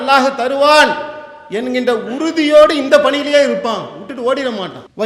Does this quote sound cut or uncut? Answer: uncut